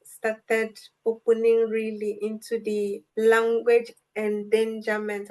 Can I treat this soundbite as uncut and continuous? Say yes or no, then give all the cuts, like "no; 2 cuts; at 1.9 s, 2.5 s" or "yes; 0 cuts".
no; 1 cut; at 3.0 s